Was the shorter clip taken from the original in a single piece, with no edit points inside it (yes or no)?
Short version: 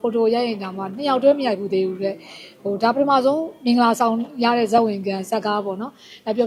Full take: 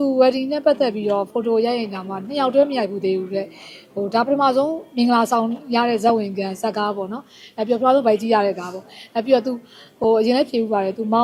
yes